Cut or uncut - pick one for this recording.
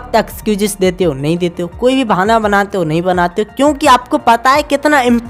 uncut